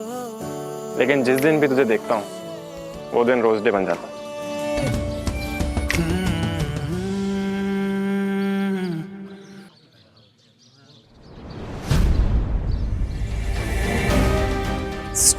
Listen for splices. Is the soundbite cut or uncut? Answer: cut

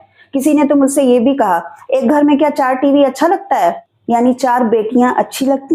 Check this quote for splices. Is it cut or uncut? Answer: cut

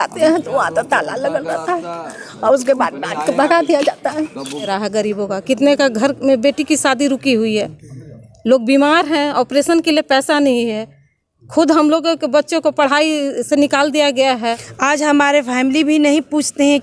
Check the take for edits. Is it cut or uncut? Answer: cut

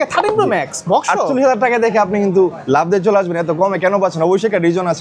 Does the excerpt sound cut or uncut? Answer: uncut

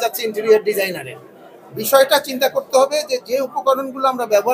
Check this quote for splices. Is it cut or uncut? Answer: uncut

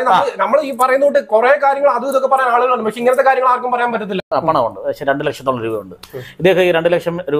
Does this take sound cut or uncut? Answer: cut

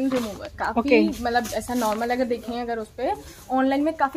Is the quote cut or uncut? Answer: uncut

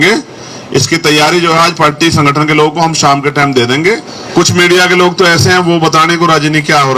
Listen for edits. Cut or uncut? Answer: cut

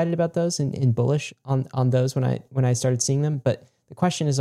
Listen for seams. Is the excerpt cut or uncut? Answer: uncut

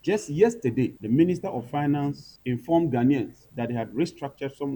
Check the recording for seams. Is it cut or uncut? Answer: cut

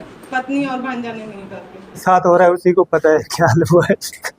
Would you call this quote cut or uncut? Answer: cut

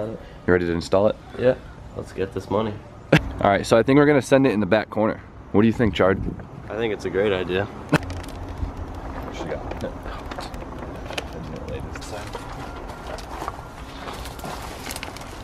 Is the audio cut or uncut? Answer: cut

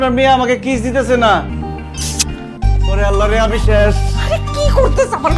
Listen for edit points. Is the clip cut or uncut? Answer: cut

